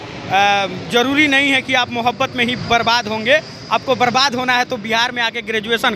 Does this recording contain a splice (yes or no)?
no